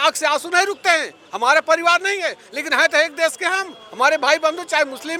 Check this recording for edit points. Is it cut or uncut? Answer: uncut